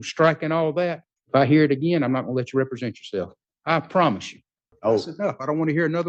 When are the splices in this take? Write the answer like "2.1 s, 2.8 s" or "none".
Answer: 1.1 s, 3.4 s, 4.6 s